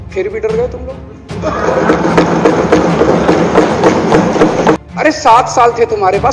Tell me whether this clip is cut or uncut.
cut